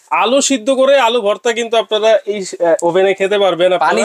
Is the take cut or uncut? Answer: uncut